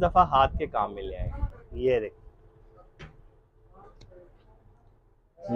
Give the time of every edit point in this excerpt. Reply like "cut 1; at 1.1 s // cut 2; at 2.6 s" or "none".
none